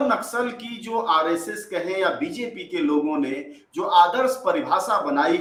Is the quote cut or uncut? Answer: uncut